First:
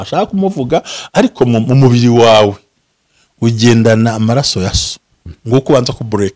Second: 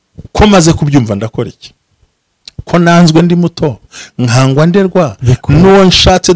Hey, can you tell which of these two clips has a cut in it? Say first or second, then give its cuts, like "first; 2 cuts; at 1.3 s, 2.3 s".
first; 1 cut; at 5.3 s